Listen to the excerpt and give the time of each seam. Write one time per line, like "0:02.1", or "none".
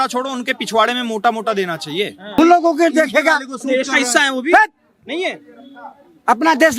0:02.4